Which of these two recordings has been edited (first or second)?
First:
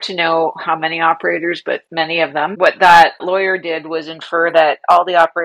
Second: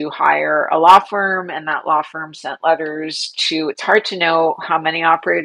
first